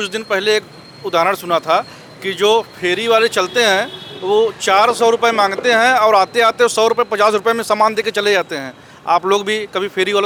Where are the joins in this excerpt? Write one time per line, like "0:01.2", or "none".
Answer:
none